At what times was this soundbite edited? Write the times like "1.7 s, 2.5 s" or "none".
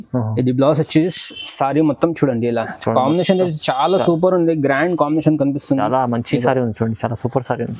none